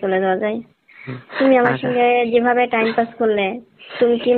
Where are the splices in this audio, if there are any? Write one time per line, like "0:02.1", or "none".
none